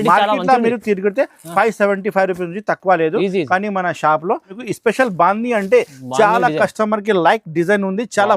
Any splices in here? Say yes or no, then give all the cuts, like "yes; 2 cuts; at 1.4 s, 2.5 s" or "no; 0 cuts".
yes; 1 cut; at 4.6 s